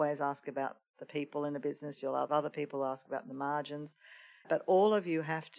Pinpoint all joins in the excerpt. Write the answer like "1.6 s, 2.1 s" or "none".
2.3 s, 4.5 s